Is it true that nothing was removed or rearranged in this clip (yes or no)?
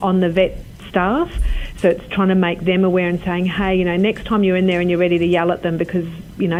yes